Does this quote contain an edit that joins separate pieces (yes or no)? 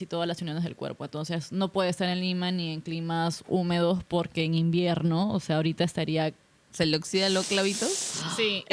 no